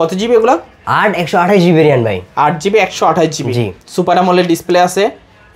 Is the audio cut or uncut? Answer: uncut